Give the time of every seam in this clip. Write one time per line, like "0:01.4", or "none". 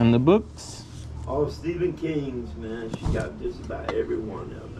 none